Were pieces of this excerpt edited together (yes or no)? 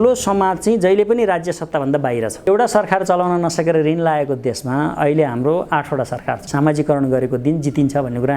yes